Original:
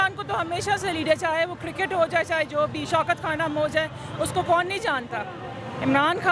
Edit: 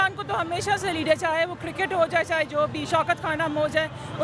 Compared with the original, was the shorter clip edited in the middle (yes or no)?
no